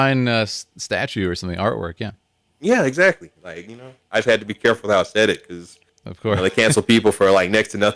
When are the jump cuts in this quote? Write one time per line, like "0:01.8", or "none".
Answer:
none

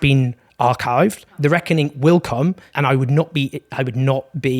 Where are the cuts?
0:01.3
0:02.7

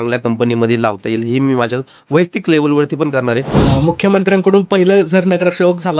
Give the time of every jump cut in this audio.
0:03.5

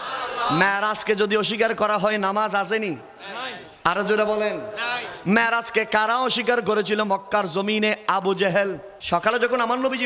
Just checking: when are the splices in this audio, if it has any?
0:08.9

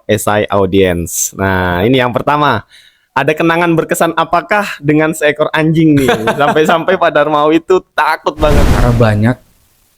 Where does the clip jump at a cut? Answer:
0:08.7

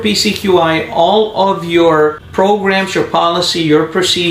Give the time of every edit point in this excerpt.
0:02.2

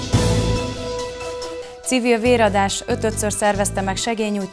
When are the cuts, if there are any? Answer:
none

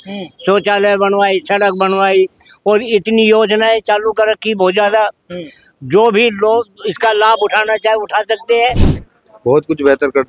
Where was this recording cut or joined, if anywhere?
0:08.8

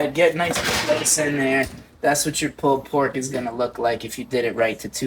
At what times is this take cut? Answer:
none

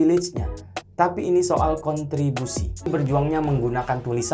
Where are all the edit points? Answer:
0:02.9

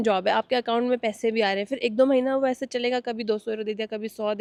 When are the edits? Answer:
none

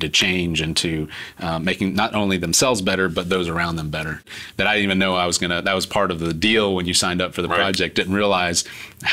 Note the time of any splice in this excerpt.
0:04.4

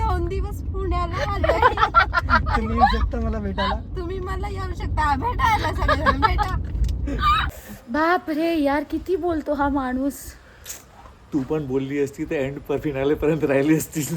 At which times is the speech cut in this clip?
0:07.6

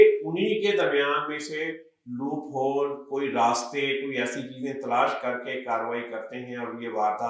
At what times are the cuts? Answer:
none

